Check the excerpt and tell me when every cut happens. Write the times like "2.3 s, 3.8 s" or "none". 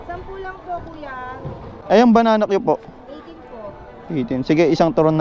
none

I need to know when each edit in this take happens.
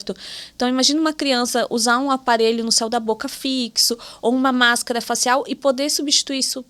none

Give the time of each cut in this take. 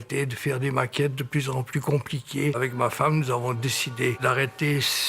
2.6 s, 4.2 s

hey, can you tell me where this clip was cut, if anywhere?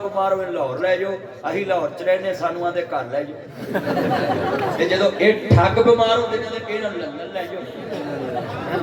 none

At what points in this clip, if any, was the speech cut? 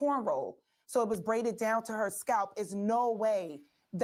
none

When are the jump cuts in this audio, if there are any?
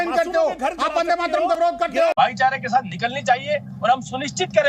2.1 s

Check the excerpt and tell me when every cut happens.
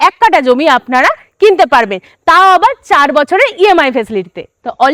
none

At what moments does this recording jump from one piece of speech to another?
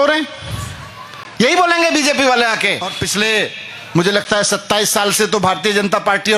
3.0 s

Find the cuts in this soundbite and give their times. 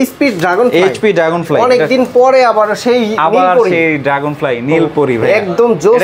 none

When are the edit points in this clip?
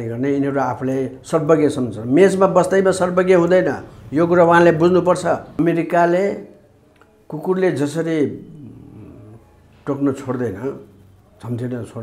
5.5 s

